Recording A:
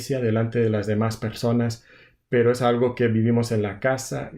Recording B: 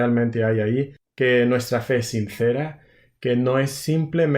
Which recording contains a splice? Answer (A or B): B